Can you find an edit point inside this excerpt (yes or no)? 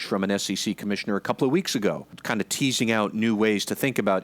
yes